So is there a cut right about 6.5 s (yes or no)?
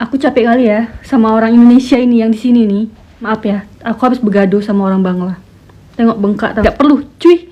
yes